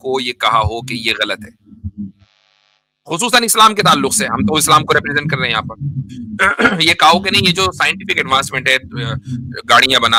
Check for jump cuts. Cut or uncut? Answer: uncut